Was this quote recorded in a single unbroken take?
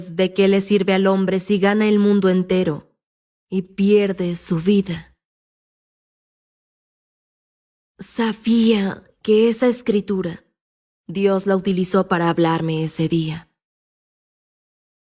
yes; 0 cuts

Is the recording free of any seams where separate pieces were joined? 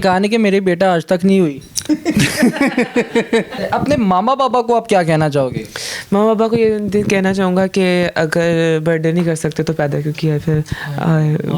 no; 1 cut; at 3.5 s

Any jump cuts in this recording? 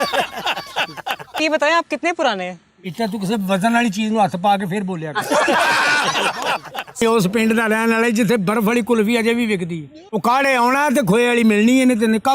yes; 2 cuts; at 1.4 s, 7.0 s

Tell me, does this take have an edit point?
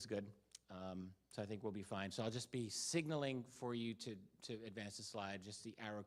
no; 0 cuts

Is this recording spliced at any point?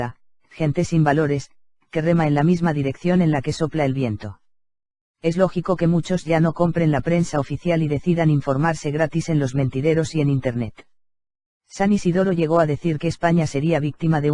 no; 0 cuts

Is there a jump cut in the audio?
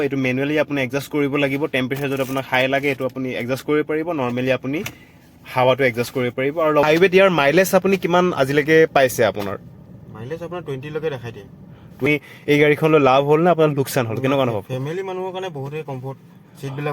yes; 2 cuts; at 6.8 s, 12.0 s

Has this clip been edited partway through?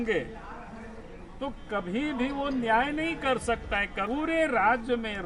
yes; 1 cut; at 4.0 s

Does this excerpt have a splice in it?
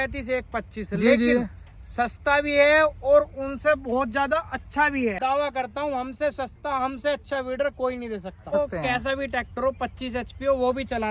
yes; 2 cuts; at 5.2 s, 8.5 s

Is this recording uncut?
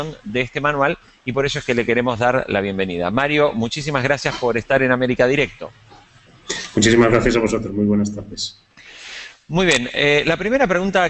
no; 1 cut; at 2.2 s

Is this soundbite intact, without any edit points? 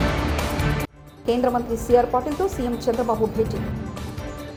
yes; 0 cuts

